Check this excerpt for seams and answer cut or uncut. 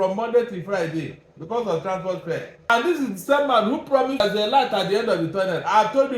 cut